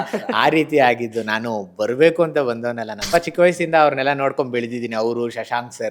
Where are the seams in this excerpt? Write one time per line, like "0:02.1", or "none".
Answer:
0:03.0